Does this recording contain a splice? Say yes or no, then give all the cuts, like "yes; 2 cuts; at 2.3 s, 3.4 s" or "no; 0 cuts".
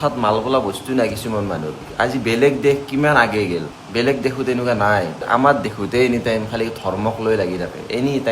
yes; 1 cut; at 3.8 s